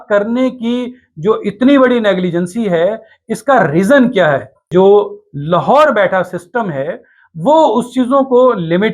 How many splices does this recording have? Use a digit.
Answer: 1